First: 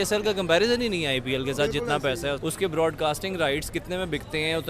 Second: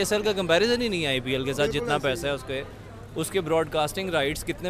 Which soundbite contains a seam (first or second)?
first